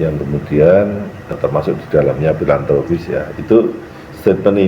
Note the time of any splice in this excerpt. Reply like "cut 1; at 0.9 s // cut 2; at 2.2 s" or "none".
cut 1; at 1.3 s